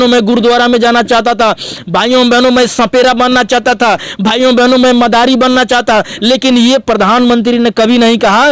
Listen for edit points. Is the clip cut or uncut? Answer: uncut